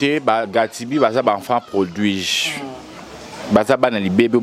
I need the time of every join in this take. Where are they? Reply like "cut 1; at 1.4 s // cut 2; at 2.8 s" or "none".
none